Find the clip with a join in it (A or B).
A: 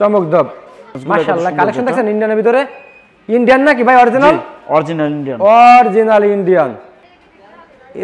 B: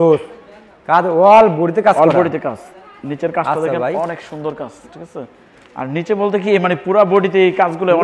A